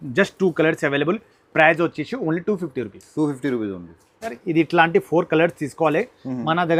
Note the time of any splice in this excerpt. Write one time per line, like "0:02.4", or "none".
none